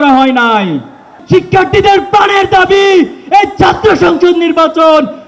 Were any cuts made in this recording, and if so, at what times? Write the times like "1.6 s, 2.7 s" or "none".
1.2 s